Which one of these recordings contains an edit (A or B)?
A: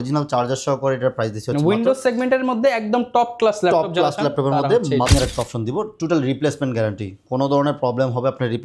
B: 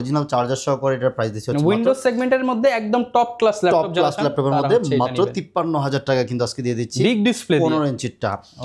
A